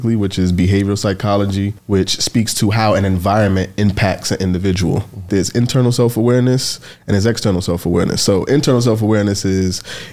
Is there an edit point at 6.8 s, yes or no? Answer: no